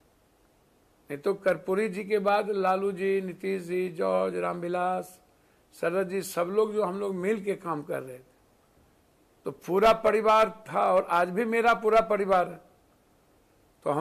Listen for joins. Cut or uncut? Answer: uncut